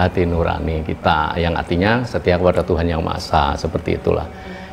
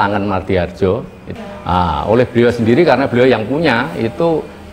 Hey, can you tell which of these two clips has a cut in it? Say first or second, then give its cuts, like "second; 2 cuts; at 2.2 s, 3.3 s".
second; 1 cut; at 1.2 s